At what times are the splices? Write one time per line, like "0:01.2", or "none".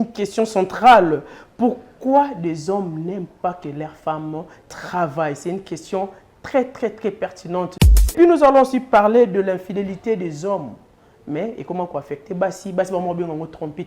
0:08.1